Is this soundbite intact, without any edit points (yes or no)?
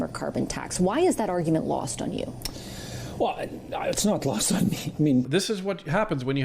no